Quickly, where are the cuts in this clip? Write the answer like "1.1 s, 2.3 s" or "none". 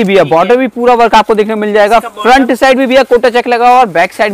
none